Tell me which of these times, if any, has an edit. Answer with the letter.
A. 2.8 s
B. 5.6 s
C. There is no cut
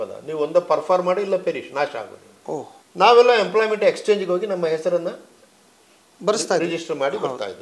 A